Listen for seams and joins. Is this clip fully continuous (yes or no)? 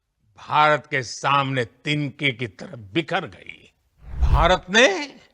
no